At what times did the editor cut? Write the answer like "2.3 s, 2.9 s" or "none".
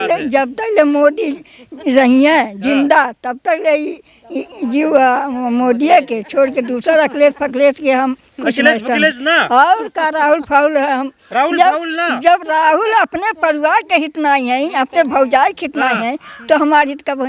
none